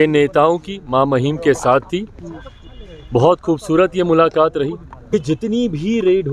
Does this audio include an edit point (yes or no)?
yes